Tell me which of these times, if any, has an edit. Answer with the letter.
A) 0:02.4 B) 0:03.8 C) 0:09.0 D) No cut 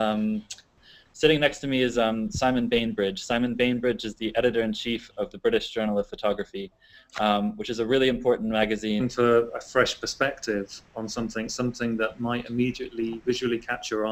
D